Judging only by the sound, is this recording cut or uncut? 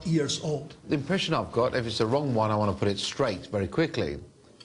cut